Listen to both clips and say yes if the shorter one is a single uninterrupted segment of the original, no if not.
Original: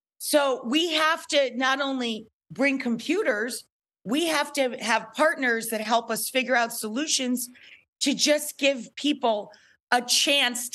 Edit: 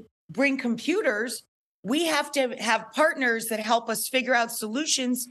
yes